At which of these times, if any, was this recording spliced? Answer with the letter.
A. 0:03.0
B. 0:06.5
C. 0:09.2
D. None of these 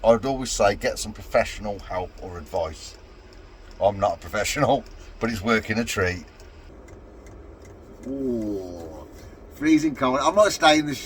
B